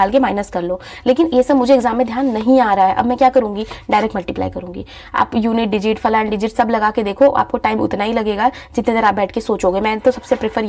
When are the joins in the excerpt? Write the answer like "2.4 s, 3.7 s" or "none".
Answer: none